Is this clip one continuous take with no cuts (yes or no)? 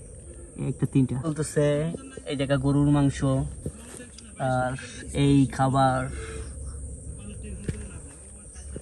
no